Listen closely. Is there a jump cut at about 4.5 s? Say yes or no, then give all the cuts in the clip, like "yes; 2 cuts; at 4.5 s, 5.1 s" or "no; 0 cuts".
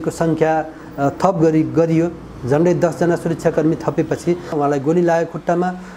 yes; 1 cut; at 4.5 s